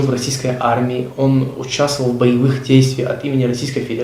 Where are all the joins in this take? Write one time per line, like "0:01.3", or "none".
none